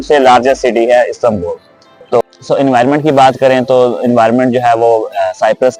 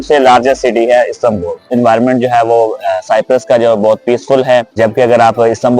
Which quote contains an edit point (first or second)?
second